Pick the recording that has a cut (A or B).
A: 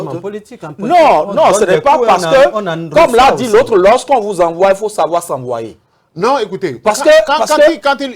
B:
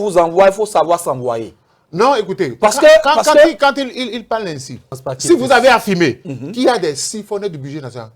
B